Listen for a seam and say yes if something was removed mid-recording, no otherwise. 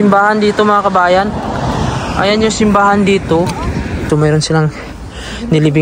yes